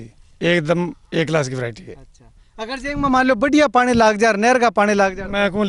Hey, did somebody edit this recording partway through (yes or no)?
no